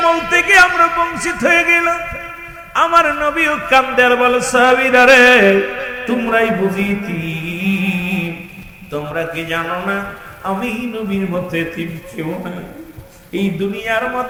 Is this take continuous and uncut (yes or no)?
yes